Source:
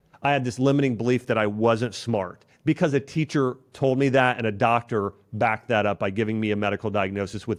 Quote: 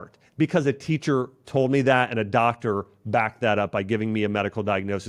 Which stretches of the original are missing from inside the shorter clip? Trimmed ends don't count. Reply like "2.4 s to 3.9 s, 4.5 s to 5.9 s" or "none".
none

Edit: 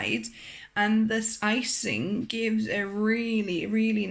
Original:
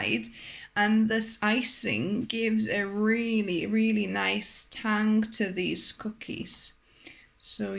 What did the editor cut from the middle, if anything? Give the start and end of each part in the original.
none

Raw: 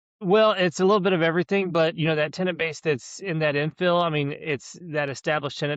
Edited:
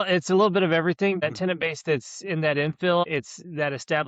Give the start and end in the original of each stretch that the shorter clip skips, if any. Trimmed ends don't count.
1.7 s to 2.2 s, 4.0 s to 4.4 s

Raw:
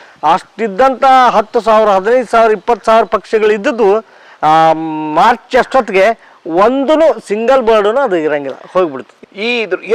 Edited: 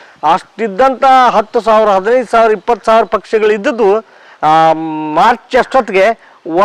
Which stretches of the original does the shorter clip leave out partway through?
none

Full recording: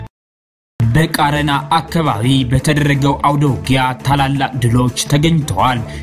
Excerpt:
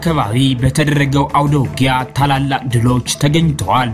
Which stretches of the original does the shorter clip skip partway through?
none

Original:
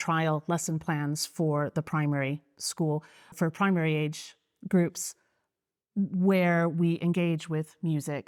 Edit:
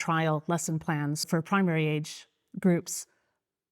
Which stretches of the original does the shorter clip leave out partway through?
1.2 s to 3.3 s

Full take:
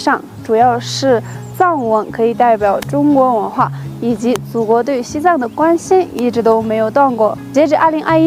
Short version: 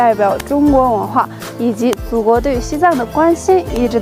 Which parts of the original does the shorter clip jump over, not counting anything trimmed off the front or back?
none

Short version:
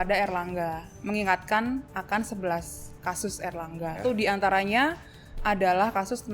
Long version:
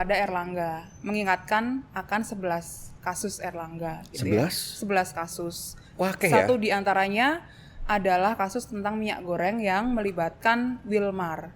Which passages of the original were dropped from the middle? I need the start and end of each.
4.0 s to 6.5 s

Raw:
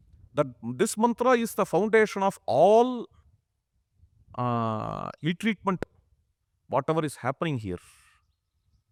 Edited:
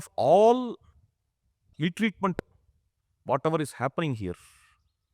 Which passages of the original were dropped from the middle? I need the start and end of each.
4.0 s to 5.1 s

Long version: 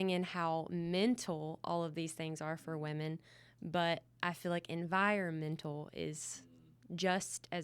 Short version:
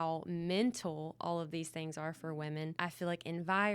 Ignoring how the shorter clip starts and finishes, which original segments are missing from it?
3.2 s to 4.2 s

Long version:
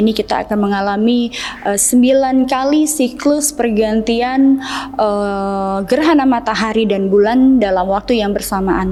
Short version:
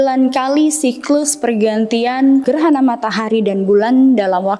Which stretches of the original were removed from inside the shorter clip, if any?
4.6 s to 5.9 s

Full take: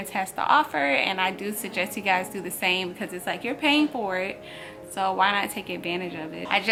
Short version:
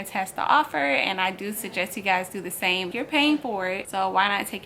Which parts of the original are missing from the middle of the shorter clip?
2.9 s to 3.4 s, 4.4 s to 4.9 s

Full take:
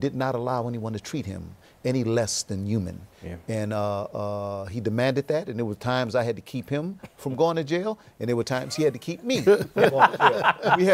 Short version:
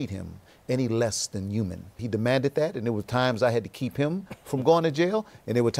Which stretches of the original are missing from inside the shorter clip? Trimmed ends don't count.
3.1 s to 4.7 s

